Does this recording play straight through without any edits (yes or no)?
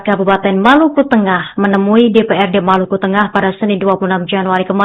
yes